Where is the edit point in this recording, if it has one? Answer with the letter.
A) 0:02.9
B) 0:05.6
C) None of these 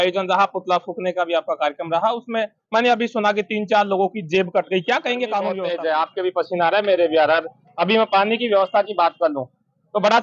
B